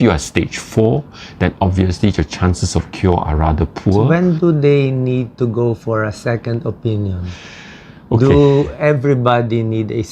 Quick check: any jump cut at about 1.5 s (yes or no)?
no